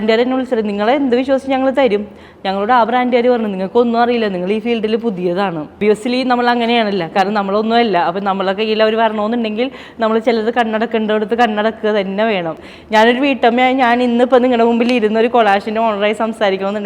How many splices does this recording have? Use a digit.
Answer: 2